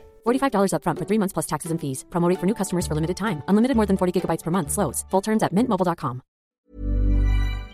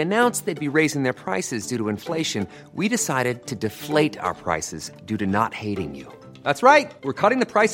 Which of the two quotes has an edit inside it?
first; 1 cut; at 6.6 s

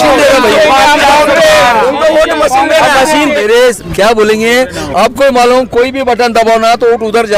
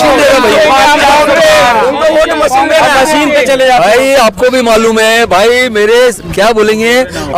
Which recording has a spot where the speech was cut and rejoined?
first; 1 cut; at 3.4 s

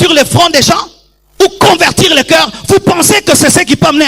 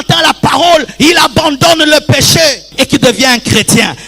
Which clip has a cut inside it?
second; 1 cut; at 2.7 s

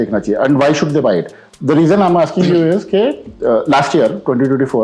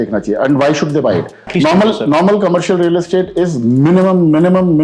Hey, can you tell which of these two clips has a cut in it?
second; 1 cut; at 1.4 s

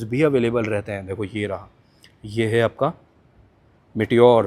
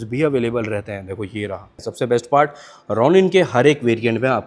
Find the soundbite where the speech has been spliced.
second; 1 cut; at 1.8 s

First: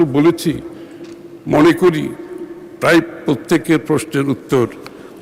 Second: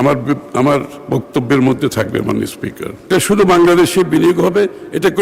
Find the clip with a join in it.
second; 1 cut; at 3.1 s

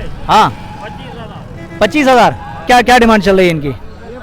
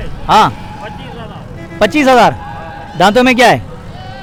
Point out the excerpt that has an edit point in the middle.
first; 1 cut; at 2.7 s

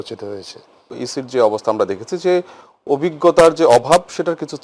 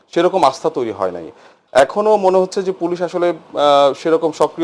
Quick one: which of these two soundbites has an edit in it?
first; 1 cut; at 1.0 s

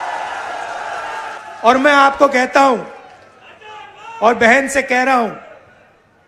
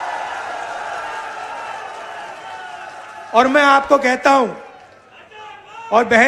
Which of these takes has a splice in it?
first; 1 cut; at 1.4 s

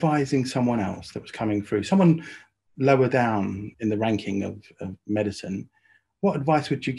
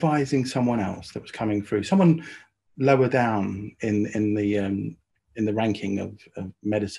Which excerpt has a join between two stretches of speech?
first; 1 cut; at 3.6 s

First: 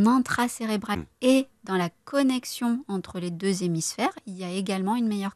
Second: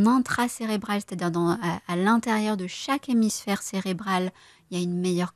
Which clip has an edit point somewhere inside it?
first; 1 cut; at 1.0 s

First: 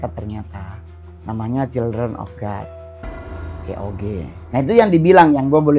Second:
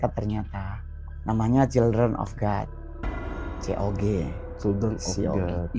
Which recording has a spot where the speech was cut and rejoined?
first; 1 cut; at 4.3 s

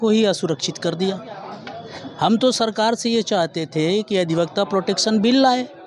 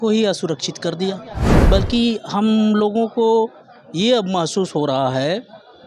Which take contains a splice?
second; 1 cut; at 1.5 s

